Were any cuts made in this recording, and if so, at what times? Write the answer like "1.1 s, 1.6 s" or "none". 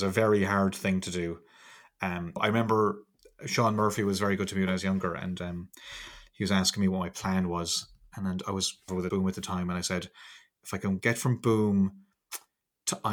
2.4 s, 9.0 s